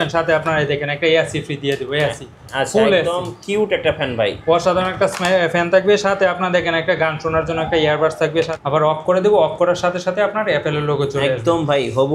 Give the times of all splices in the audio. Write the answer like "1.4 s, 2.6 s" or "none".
8.5 s